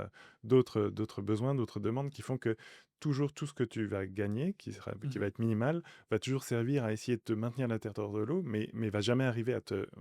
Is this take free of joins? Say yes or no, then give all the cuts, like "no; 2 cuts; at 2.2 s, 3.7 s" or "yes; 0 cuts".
yes; 0 cuts